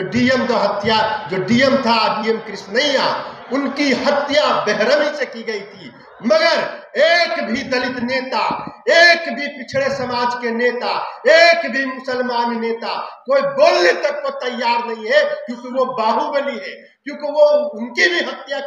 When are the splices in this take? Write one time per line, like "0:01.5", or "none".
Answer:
none